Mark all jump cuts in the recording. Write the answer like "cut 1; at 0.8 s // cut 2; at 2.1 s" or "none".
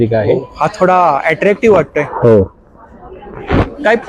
none